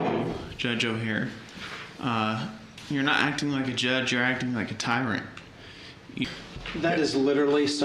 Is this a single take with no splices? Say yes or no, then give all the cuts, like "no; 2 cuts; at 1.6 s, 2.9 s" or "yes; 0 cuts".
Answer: no; 1 cut; at 6.2 s